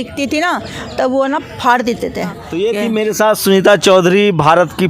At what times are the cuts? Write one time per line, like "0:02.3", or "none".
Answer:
0:02.4